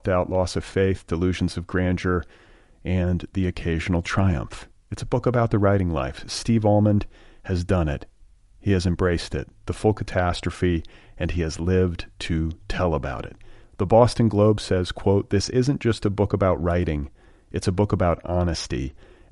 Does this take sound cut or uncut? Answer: uncut